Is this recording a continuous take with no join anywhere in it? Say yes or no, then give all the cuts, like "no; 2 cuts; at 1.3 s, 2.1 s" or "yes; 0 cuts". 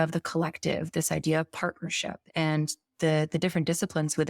no; 1 cut; at 2.2 s